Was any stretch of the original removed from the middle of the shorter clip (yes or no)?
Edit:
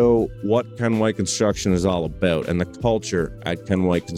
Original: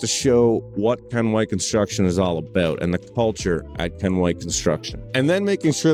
no